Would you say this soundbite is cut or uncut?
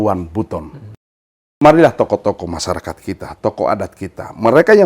cut